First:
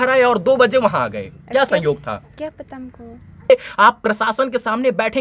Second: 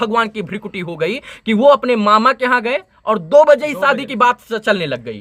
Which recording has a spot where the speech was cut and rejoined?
first; 1 cut; at 3.5 s

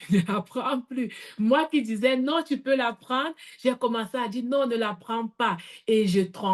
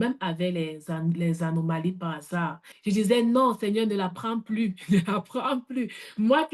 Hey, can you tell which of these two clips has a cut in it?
second; 1 cut; at 2.6 s

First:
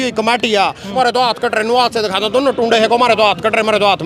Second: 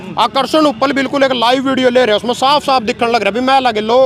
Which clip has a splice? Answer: first; 1 cut; at 0.9 s

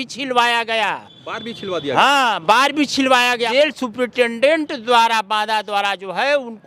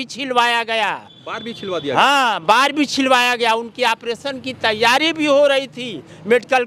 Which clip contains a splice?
first; 1 cut; at 3.5 s

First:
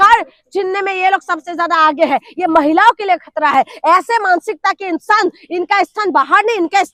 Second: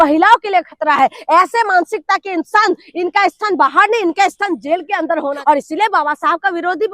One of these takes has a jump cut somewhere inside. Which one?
second; 1 cut; at 5.4 s

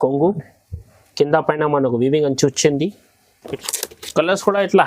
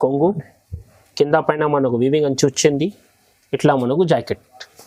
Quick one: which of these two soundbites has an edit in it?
first; 1 cut; at 3.5 s

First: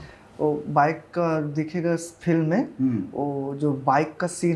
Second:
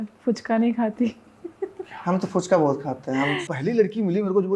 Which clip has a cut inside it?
second; 1 cut; at 3.5 s

